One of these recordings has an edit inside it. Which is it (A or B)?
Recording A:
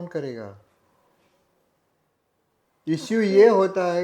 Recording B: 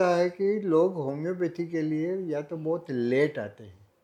A